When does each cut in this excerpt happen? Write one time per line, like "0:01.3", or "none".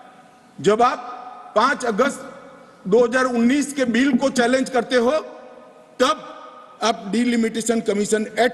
none